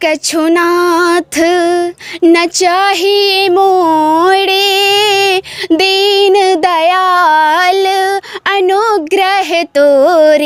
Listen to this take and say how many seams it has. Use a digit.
0